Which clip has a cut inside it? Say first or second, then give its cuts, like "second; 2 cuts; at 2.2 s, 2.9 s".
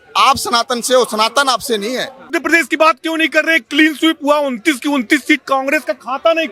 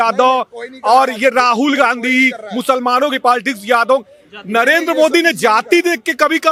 first; 1 cut; at 2.3 s